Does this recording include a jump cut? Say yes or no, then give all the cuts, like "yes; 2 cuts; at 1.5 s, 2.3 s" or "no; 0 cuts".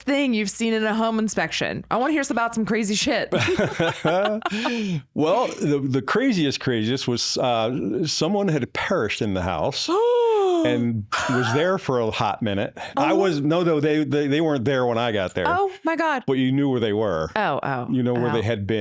no; 0 cuts